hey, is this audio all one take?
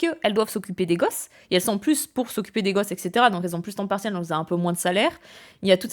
yes; 0 cuts

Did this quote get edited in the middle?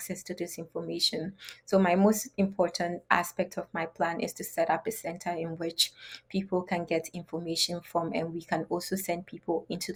no; 0 cuts

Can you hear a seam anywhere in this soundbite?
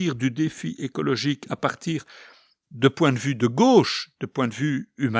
no; 0 cuts

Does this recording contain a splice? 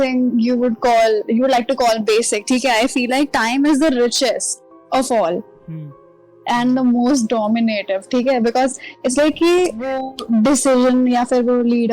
no; 0 cuts

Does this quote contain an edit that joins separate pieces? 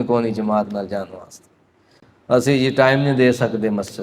no; 0 cuts

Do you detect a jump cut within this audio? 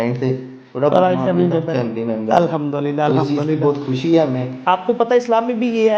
yes; 1 cut; at 4.5 s

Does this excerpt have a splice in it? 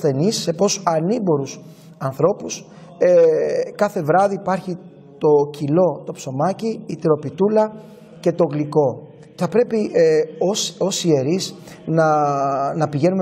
yes; 1 cut; at 9.3 s

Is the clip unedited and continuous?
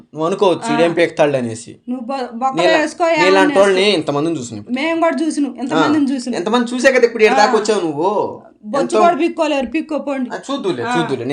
yes; 0 cuts

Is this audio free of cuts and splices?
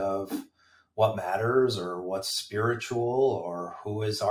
yes; 0 cuts

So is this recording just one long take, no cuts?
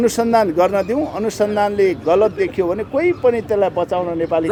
yes; 0 cuts

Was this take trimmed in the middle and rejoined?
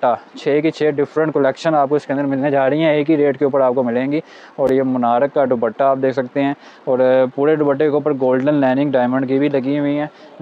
no; 0 cuts

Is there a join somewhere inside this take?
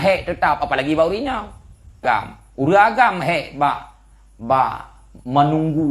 yes; 1 cut; at 2.0 s

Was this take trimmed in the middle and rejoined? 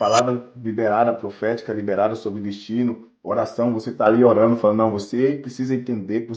no; 0 cuts

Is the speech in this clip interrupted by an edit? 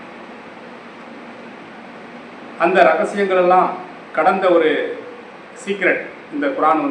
no; 0 cuts

